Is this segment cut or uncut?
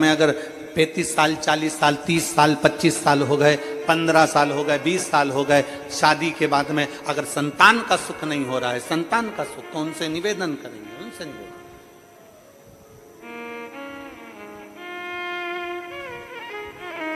uncut